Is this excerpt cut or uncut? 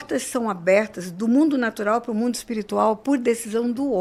uncut